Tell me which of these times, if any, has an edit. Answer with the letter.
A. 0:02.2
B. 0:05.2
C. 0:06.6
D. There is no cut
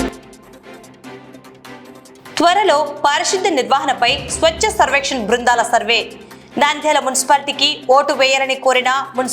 A